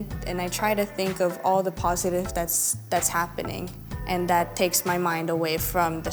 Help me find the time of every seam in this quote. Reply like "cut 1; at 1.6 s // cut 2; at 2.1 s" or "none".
none